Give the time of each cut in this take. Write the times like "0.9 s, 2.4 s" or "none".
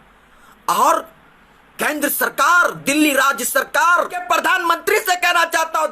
4.2 s